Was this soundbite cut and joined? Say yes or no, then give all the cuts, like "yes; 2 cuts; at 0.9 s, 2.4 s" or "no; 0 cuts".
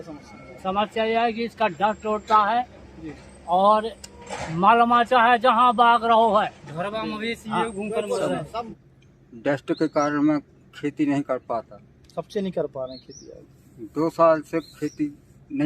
yes; 1 cut; at 8.7 s